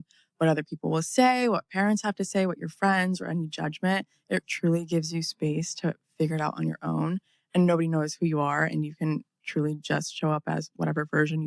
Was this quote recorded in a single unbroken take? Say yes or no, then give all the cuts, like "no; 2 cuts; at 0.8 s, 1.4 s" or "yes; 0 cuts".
yes; 0 cuts